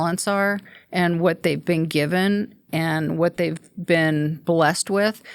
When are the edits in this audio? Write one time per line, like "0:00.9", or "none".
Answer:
none